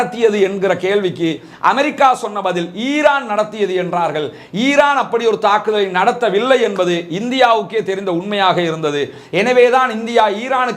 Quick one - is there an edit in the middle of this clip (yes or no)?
no